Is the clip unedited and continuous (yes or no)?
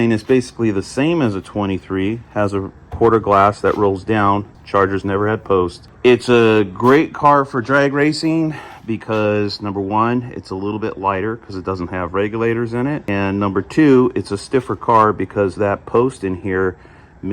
no